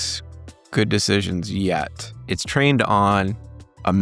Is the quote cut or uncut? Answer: cut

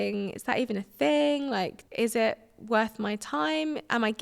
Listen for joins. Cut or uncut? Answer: cut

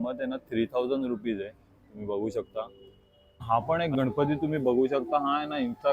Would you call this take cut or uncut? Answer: cut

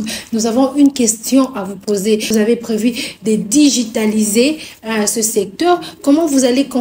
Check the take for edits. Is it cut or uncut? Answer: cut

